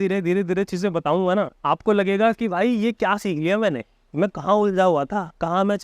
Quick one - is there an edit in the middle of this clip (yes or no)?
yes